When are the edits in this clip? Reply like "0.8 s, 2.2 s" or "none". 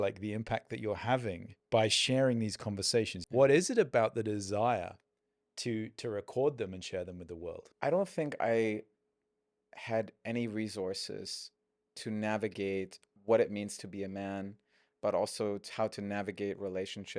1.5 s, 3.2 s, 7.6 s, 13.2 s